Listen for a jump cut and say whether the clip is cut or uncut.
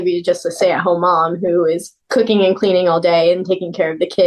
uncut